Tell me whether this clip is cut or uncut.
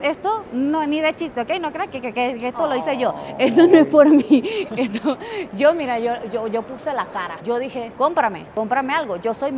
uncut